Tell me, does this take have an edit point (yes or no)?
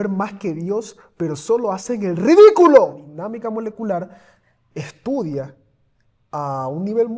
yes